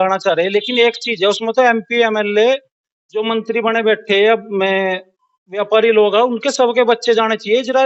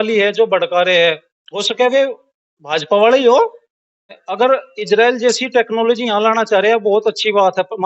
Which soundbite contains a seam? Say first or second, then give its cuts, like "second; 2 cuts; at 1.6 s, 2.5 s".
second; 1 cut; at 4.2 s